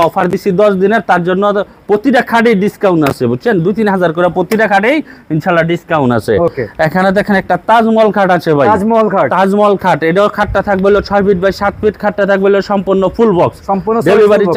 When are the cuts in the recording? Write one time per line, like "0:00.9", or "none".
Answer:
none